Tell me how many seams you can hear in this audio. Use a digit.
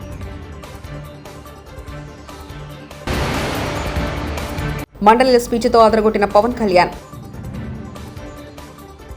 0